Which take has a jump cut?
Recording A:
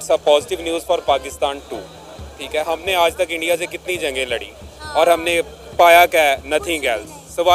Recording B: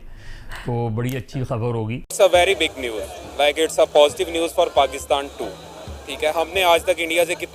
B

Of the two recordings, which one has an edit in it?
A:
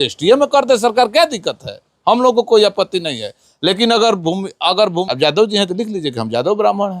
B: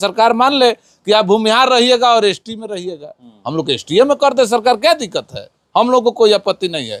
A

